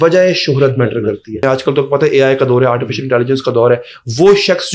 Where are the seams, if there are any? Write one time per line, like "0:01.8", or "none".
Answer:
0:01.4